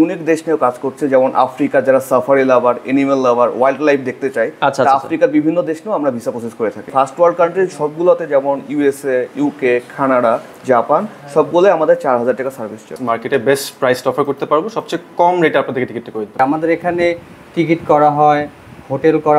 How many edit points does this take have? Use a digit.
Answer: 3